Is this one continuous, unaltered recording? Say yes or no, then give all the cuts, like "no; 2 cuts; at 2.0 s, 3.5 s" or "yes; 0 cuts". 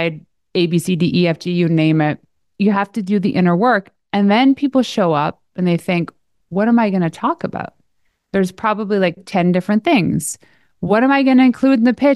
no; 1 cut; at 2.4 s